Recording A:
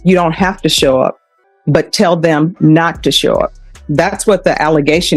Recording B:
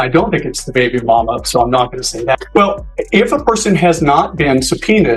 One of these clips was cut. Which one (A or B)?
B